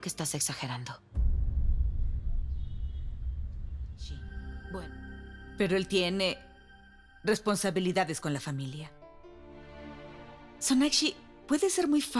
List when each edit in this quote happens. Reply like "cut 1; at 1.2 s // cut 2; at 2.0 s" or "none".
cut 1; at 4.8 s